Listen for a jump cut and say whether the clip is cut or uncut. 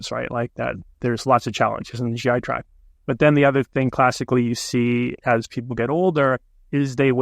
uncut